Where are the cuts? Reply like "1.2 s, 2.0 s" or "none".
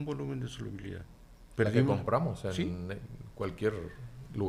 none